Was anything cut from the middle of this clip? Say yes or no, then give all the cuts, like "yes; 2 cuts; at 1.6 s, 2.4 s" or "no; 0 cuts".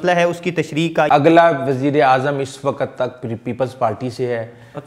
yes; 1 cut; at 1.1 s